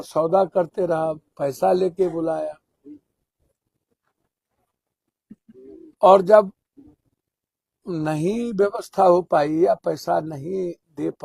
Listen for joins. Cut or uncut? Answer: uncut